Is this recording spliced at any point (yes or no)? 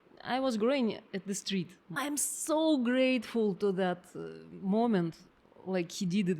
yes